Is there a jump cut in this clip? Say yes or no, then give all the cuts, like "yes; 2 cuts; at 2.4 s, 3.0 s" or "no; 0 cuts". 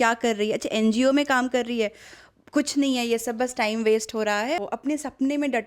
yes; 1 cut; at 4.6 s